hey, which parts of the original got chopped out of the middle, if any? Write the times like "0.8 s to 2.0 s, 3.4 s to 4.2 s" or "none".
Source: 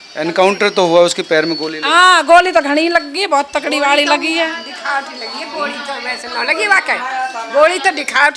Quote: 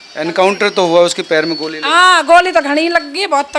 none